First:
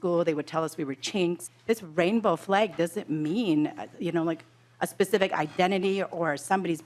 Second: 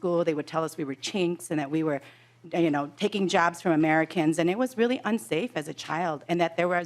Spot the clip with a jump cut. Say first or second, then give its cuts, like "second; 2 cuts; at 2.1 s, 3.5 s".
first; 1 cut; at 1.4 s